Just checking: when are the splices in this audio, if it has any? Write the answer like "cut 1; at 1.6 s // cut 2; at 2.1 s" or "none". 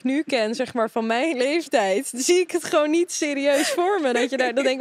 none